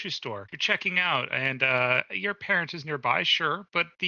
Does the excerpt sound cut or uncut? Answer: uncut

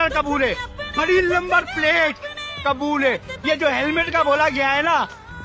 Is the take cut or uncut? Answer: uncut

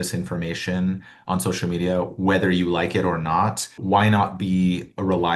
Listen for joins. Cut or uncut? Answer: uncut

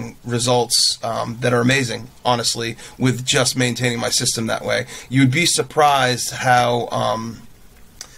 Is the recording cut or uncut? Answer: uncut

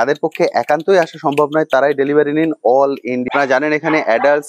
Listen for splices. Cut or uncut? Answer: cut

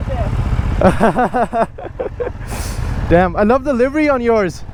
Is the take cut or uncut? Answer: uncut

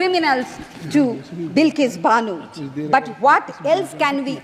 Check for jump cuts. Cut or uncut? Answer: uncut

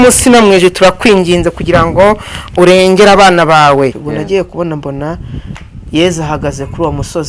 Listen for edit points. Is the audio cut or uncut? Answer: cut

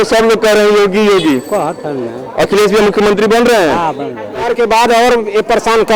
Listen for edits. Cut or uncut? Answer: cut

